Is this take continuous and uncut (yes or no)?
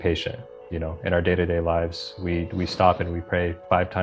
yes